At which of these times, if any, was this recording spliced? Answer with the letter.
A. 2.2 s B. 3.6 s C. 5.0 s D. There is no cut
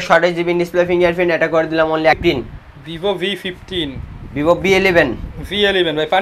A